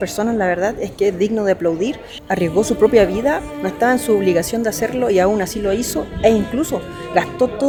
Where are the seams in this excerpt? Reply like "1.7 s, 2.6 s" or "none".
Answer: none

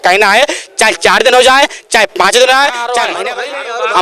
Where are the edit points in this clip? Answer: 3.1 s

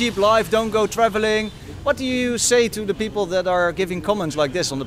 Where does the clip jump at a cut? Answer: none

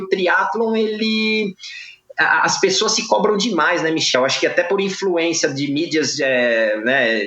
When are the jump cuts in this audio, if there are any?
4.1 s

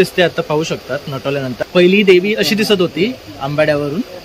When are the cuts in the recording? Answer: 1.5 s

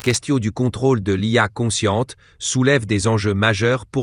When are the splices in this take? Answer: none

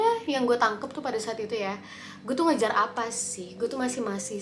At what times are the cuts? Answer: none

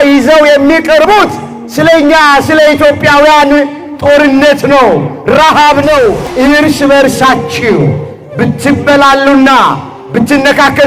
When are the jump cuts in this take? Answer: 6.3 s

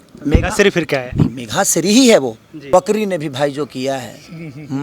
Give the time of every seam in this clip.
2.5 s

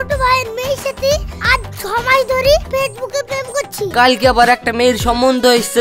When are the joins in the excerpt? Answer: 3.9 s

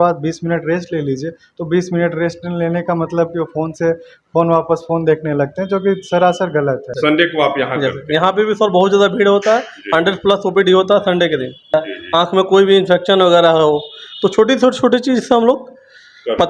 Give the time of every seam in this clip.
6.9 s, 11.7 s

